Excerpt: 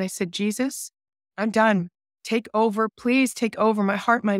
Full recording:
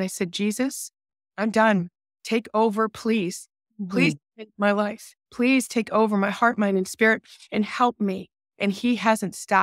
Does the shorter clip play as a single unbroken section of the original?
no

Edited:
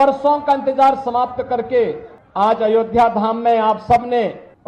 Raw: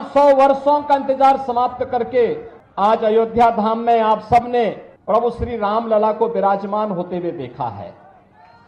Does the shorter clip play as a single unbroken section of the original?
yes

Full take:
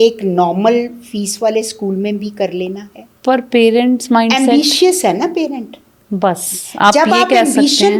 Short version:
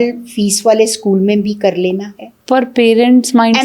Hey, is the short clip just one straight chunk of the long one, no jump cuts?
yes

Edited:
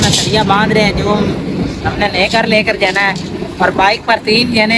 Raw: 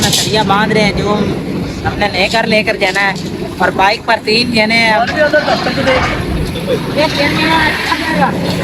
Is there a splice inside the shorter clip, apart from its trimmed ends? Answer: no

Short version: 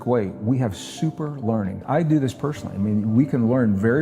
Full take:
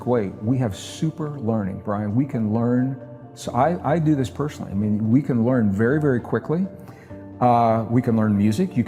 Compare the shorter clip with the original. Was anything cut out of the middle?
yes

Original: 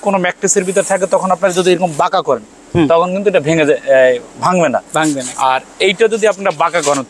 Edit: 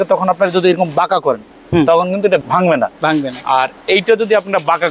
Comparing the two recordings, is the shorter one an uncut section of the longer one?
no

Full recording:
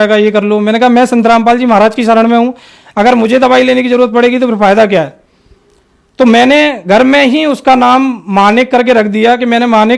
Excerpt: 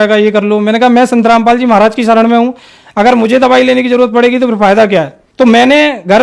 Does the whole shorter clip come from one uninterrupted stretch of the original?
no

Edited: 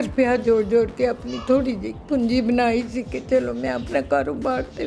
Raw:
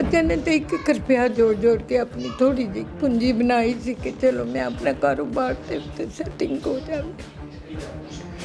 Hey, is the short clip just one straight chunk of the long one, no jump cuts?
yes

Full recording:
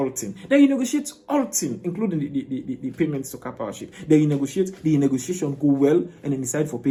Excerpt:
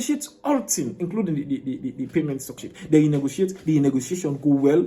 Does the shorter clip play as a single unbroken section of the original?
no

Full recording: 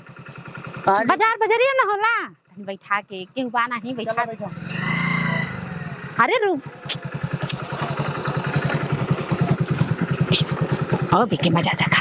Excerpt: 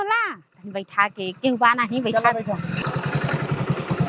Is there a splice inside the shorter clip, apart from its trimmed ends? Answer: yes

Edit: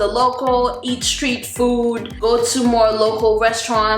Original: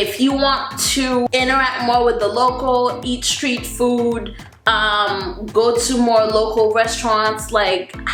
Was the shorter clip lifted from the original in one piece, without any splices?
no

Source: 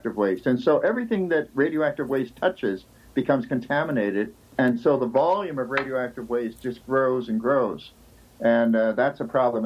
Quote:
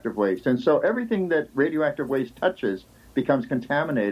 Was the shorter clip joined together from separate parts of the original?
no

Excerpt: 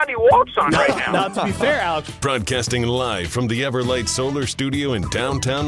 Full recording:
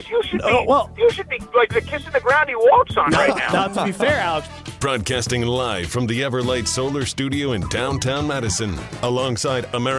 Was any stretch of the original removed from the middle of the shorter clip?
yes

